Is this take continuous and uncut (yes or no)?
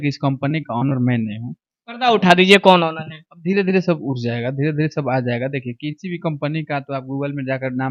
yes